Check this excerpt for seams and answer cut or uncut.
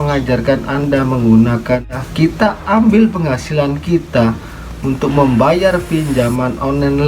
cut